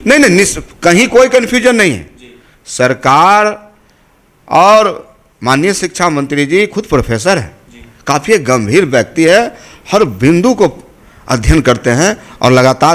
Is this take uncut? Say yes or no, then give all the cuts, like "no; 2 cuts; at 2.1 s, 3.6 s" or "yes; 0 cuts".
yes; 0 cuts